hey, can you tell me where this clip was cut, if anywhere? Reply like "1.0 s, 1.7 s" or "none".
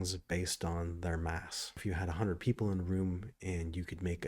1.8 s